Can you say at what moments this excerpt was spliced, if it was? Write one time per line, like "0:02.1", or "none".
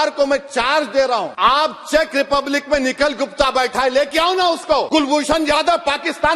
0:01.3
0:04.9